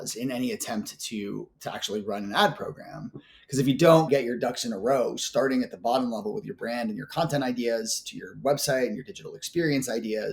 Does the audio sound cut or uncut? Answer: uncut